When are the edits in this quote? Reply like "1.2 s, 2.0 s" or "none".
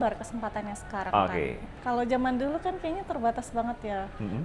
1.7 s